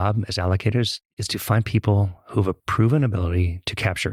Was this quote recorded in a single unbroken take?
yes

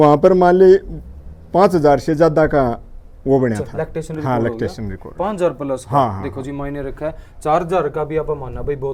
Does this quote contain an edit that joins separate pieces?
no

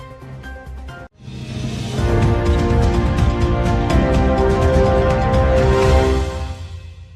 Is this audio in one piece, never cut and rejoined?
yes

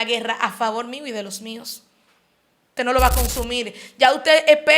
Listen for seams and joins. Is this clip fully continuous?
no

